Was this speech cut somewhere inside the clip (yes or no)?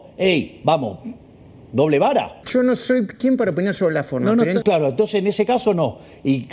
yes